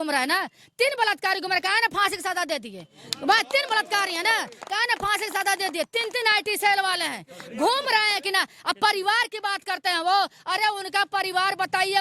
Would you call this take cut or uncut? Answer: uncut